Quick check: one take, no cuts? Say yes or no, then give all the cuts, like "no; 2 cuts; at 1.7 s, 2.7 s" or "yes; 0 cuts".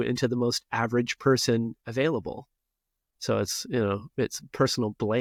yes; 0 cuts